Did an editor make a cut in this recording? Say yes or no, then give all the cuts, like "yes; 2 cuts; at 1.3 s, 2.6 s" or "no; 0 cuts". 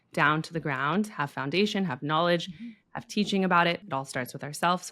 yes; 1 cut; at 3.8 s